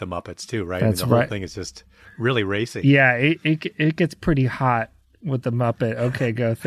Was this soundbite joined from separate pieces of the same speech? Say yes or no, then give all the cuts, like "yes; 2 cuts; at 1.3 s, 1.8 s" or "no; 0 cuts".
no; 0 cuts